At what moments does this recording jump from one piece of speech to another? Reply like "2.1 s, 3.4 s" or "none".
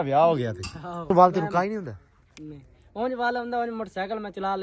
1.1 s